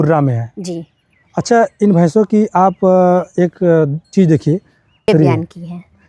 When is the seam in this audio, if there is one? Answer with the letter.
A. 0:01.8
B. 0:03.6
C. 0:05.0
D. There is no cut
C